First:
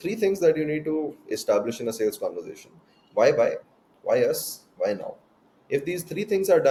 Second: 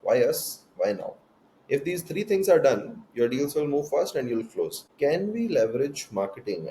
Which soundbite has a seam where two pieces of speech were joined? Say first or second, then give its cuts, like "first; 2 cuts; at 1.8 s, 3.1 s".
second; 1 cut; at 4.8 s